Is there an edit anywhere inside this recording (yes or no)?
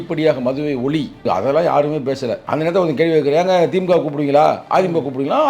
yes